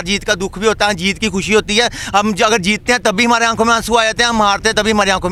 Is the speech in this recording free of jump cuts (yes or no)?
yes